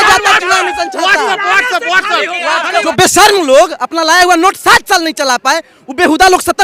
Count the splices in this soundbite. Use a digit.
1